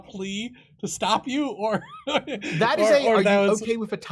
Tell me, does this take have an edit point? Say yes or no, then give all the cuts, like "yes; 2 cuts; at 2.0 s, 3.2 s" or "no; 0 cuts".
no; 0 cuts